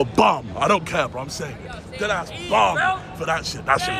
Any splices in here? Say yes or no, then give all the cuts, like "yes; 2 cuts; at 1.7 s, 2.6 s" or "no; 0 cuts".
no; 0 cuts